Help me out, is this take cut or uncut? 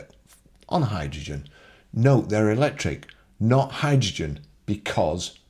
uncut